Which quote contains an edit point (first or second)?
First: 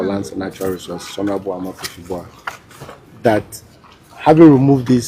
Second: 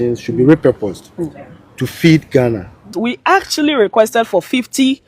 second